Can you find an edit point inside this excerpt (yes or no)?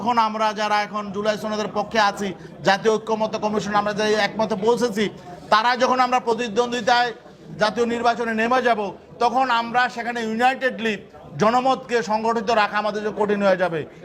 no